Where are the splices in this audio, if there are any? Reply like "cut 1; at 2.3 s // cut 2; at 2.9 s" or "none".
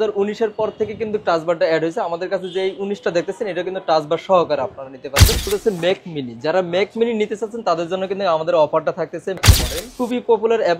cut 1; at 5.5 s // cut 2; at 9.4 s